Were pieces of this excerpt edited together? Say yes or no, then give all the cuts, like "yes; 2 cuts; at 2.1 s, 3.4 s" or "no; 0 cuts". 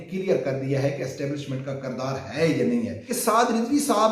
yes; 1 cut; at 3.0 s